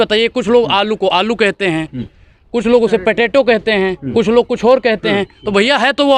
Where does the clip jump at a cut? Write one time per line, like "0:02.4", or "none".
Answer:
none